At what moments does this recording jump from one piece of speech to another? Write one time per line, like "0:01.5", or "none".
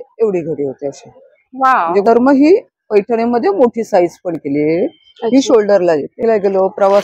0:02.0
0:06.2